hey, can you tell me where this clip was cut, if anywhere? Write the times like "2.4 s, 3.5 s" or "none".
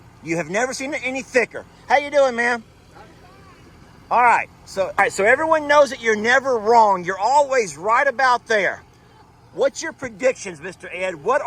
5.0 s